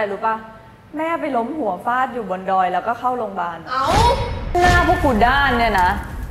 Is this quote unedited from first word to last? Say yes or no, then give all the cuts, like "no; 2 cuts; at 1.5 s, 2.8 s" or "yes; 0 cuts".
no; 1 cut; at 4.5 s